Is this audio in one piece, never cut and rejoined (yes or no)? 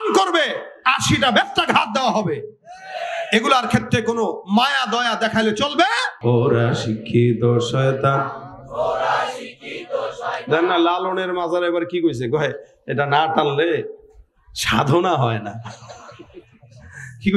no